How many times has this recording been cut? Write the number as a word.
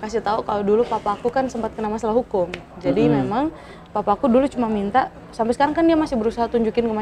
zero